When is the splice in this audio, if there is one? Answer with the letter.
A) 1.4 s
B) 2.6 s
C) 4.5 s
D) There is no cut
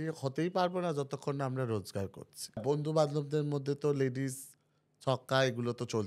B